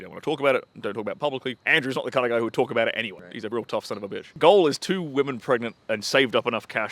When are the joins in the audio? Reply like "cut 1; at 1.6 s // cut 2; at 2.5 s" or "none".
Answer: cut 1; at 1.6 s // cut 2; at 3.3 s // cut 3; at 4.4 s // cut 4; at 5.8 s